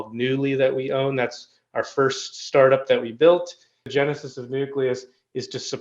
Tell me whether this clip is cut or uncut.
cut